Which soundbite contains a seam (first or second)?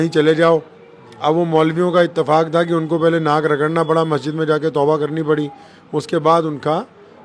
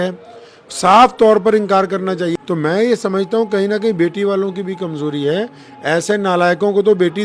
second